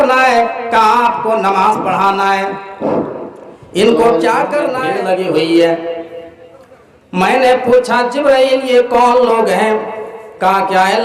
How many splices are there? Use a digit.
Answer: 1